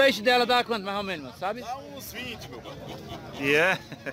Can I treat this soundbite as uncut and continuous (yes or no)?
yes